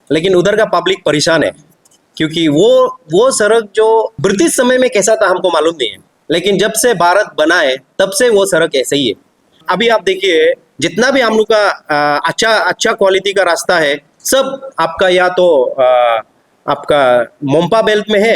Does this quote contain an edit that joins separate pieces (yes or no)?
yes